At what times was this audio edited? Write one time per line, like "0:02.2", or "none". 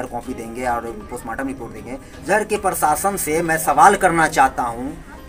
0:02.2